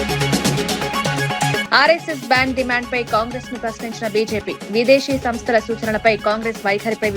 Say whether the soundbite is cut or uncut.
cut